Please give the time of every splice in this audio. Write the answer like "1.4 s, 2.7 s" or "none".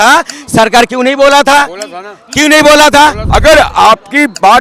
3.2 s